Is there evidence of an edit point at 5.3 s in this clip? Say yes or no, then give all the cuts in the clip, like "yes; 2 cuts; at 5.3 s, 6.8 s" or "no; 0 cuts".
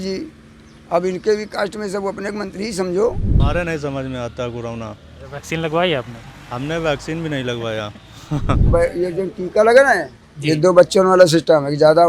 no; 2 cuts; at 3.3 s, 8.6 s